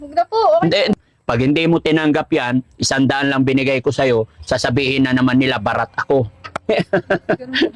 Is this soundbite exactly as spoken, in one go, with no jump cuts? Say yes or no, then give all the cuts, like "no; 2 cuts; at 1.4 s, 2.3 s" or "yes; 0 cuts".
no; 1 cut; at 0.9 s